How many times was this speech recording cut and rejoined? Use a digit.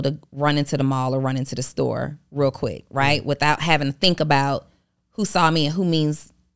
0